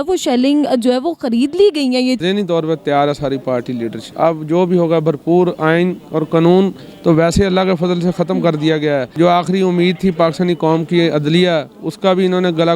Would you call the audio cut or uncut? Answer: cut